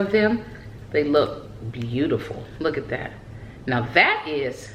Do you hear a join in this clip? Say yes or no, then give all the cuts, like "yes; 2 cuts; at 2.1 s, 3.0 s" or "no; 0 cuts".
no; 0 cuts